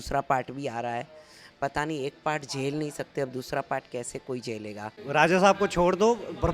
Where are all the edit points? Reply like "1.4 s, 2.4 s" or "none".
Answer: 5.0 s